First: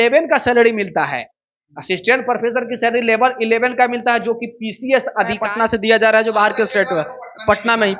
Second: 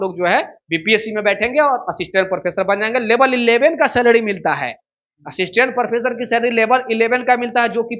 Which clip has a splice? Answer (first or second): first